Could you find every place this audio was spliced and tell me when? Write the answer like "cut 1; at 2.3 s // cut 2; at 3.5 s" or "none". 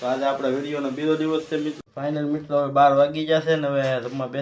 cut 1; at 1.8 s